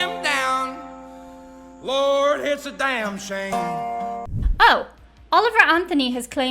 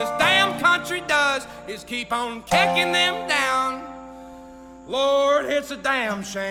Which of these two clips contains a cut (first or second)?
first